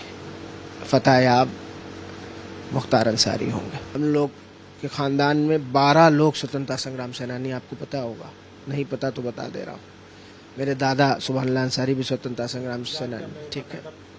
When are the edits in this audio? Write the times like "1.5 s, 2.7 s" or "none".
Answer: 3.8 s